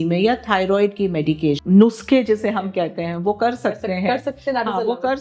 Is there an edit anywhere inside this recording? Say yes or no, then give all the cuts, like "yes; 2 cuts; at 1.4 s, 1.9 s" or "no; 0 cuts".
yes; 1 cut; at 1.6 s